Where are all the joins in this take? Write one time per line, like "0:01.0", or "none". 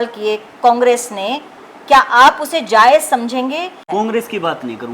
0:03.8